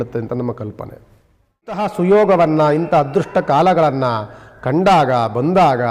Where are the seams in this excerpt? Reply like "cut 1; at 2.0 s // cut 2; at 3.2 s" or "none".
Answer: cut 1; at 1.8 s